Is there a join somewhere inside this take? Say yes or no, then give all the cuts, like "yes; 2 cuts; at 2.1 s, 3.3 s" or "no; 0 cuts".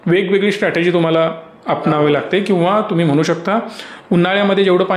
no; 0 cuts